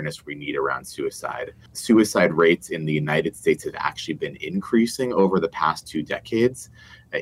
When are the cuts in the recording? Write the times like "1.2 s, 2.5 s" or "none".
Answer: 1.6 s